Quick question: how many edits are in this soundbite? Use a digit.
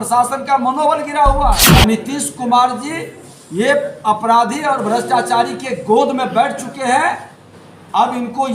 1